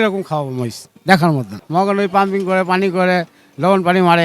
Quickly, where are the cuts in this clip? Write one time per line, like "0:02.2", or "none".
0:01.6